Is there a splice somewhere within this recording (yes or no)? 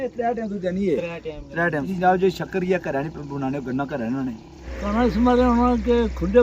yes